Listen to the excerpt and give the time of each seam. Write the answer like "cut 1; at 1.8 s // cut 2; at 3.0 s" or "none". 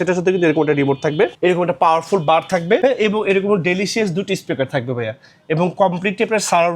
cut 1; at 1.3 s // cut 2; at 2.8 s

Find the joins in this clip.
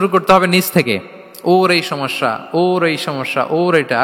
none

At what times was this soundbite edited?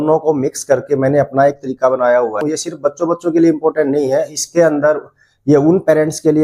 cut 1; at 2.4 s

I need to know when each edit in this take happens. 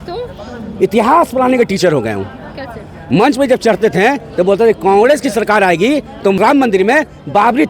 cut 1; at 6.4 s

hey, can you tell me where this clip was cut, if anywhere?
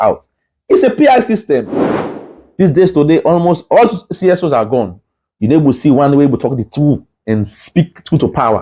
cut 1; at 2.2 s

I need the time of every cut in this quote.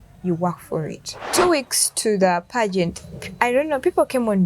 cut 1; at 1.3 s

